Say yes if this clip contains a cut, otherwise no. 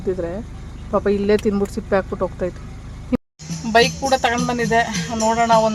yes